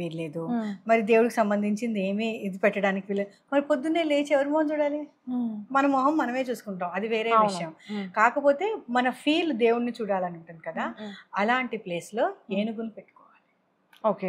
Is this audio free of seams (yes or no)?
yes